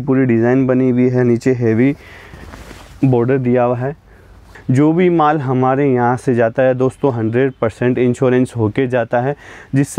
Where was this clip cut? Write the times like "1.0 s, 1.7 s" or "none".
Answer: 4.5 s